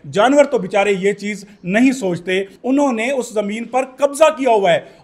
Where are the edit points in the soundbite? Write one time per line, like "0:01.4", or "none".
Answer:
0:02.5